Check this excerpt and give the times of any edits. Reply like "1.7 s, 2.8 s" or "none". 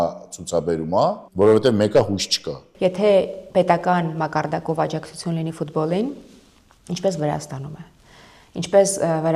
1.2 s, 2.6 s